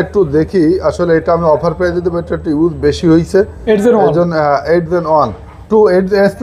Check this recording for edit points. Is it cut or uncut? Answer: uncut